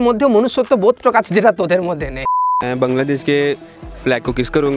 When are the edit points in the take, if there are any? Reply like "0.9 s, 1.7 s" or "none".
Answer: 2.5 s